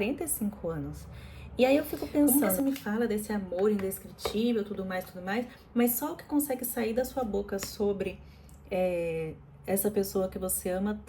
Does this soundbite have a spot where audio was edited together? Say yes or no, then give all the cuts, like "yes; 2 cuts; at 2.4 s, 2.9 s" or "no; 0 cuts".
yes; 1 cut; at 2.3 s